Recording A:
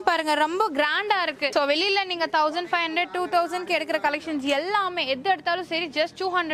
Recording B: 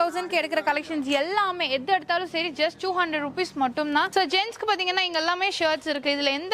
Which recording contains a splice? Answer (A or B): B